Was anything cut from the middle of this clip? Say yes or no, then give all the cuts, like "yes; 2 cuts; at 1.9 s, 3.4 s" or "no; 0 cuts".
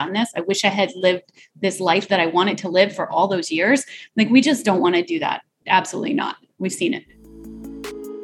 yes; 2 cuts; at 5.5 s, 7.2 s